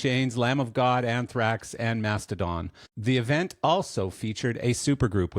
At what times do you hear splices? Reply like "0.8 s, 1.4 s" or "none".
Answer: 2.8 s